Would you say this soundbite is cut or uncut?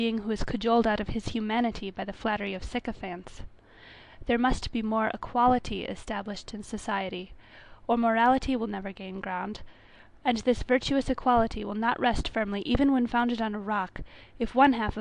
cut